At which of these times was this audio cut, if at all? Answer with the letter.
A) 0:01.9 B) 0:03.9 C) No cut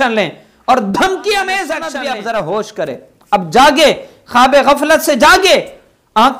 A